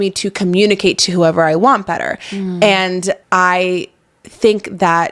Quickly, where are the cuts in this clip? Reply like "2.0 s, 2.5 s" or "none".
3.2 s